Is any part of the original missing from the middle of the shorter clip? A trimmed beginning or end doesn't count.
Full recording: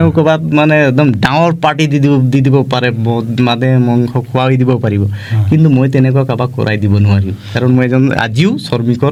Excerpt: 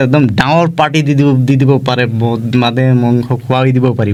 no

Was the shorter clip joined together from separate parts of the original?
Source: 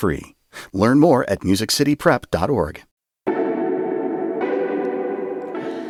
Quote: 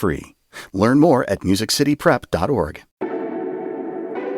yes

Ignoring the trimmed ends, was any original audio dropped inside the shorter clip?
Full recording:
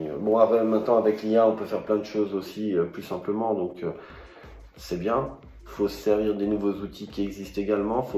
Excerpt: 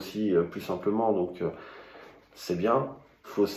no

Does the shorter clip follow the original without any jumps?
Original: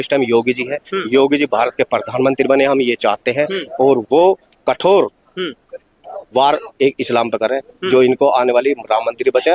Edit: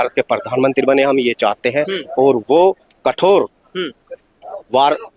yes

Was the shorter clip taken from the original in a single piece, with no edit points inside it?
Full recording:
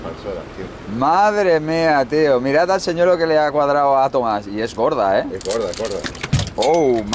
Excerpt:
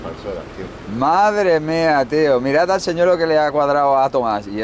yes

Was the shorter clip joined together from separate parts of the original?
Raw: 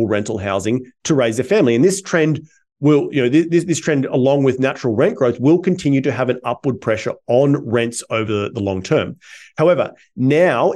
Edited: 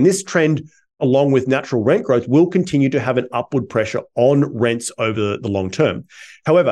yes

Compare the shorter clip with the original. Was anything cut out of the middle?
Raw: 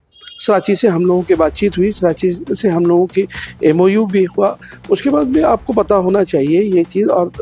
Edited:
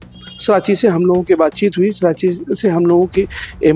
no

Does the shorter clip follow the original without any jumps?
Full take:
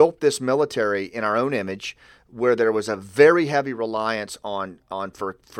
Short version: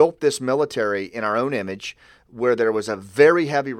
yes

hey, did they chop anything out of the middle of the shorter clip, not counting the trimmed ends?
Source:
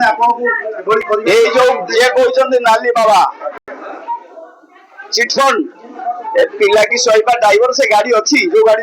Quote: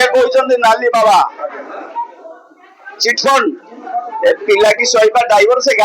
yes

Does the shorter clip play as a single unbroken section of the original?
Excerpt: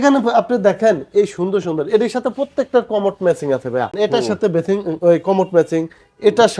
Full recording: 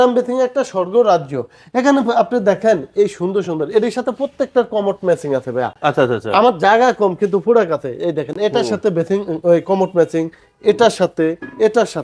no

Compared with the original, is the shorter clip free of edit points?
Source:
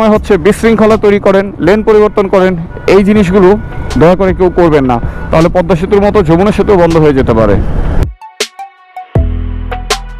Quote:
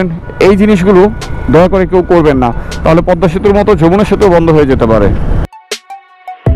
no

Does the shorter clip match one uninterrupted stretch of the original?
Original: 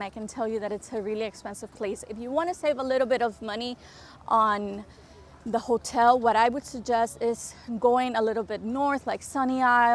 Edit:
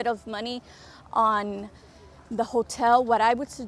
yes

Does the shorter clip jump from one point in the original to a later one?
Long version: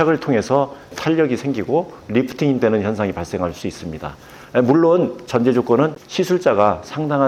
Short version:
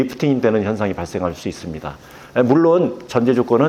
no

